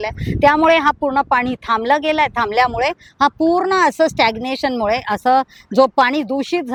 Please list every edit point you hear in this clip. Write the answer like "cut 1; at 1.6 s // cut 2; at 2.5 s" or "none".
none